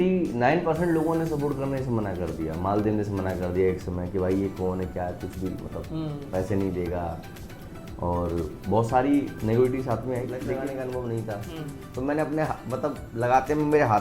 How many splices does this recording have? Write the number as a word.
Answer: one